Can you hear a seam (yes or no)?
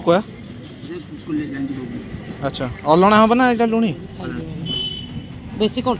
yes